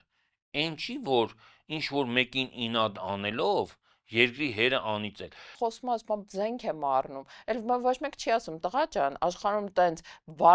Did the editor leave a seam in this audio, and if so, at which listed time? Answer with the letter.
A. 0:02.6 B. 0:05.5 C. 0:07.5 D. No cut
B